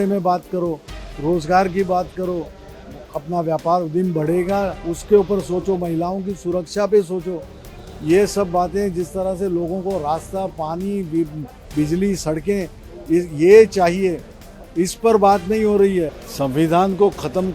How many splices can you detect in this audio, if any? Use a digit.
1